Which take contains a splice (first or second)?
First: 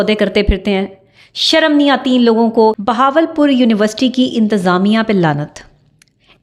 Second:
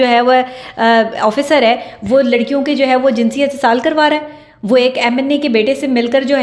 first